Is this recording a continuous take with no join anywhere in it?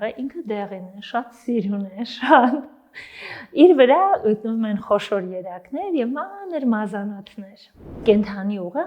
no; 1 cut; at 7.9 s

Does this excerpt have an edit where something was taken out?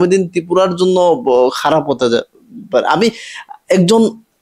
no; 0 cuts

